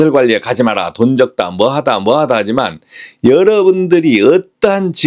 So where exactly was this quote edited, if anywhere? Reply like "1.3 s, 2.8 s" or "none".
none